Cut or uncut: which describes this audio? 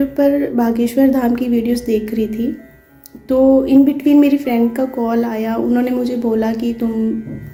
uncut